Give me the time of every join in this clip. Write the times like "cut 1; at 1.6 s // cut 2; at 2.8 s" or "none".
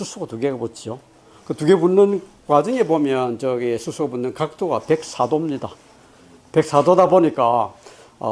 none